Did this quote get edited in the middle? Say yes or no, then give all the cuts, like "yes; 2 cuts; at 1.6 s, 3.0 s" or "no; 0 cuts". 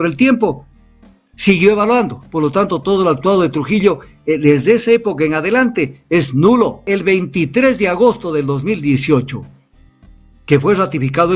yes; 1 cut; at 6.8 s